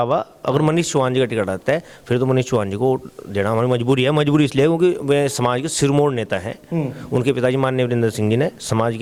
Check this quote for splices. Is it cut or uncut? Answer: uncut